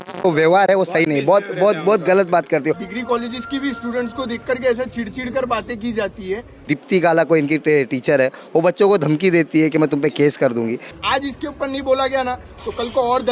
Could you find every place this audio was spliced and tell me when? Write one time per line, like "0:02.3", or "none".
0:02.8
0:06.7
0:10.9